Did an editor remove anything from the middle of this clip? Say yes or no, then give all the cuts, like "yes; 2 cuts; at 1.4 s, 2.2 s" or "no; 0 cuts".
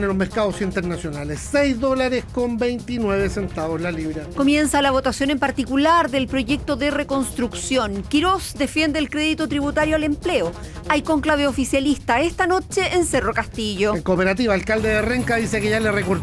no; 0 cuts